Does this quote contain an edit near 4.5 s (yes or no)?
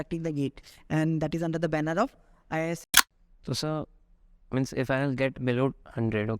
no